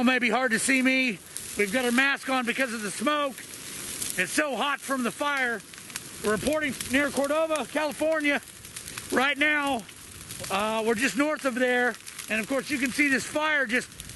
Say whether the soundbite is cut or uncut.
uncut